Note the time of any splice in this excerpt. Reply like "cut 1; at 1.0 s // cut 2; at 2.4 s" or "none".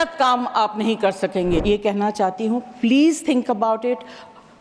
cut 1; at 1.6 s